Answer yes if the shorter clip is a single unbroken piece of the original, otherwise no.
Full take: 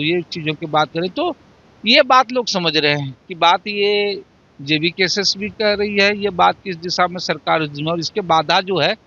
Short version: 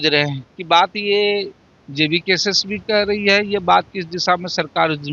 yes